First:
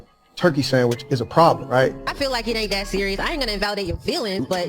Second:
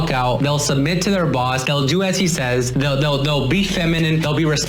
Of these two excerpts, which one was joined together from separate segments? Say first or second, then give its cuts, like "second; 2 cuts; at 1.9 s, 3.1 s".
first; 1 cut; at 2.1 s